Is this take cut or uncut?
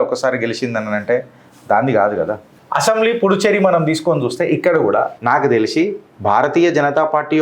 cut